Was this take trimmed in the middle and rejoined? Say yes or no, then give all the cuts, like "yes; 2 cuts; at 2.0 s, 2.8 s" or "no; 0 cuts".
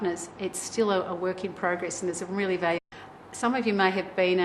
no; 0 cuts